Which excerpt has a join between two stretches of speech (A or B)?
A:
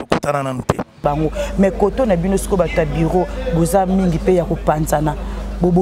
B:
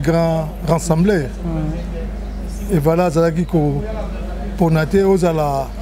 A